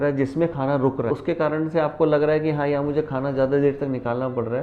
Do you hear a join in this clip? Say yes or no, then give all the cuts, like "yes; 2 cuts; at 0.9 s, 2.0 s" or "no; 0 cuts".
no; 0 cuts